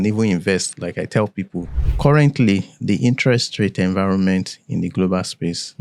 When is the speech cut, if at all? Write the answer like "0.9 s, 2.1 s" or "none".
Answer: 1.8 s

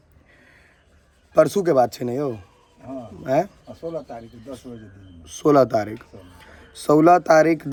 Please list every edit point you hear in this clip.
none

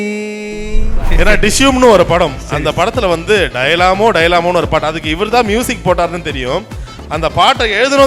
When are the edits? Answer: 1.0 s

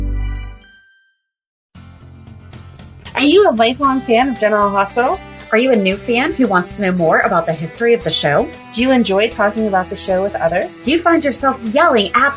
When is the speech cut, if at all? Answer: 1.7 s

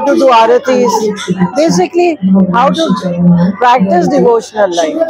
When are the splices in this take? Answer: none

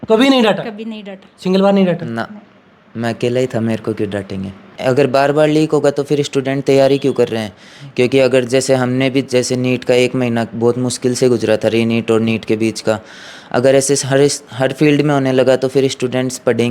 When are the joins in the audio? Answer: 4.7 s

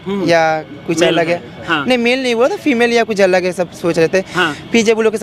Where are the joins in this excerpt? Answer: none

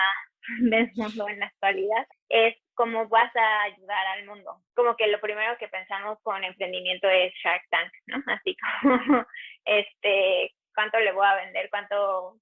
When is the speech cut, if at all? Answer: 2.2 s, 4.6 s

